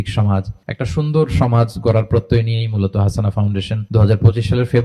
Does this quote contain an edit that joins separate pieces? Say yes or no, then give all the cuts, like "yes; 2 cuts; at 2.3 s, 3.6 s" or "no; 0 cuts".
yes; 1 cut; at 3.8 s